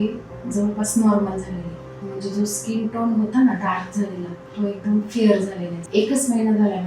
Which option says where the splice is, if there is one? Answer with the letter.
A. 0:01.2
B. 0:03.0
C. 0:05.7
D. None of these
C